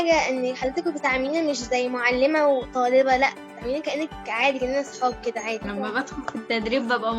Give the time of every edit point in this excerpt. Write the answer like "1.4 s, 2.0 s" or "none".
5.7 s